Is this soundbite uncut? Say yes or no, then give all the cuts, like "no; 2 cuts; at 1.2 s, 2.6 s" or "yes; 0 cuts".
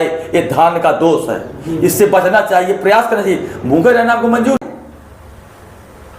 no; 1 cut; at 4.6 s